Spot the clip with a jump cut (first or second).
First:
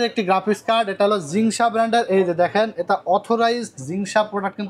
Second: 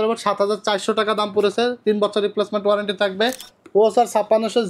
second